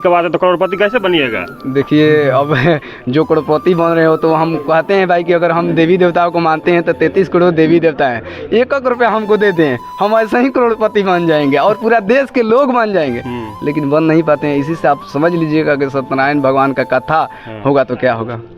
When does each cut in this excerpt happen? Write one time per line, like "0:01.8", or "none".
none